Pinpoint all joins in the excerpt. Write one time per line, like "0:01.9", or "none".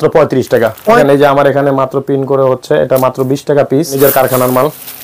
0:01.0
0:03.9